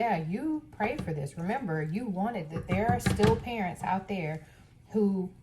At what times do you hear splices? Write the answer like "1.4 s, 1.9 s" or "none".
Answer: 2.6 s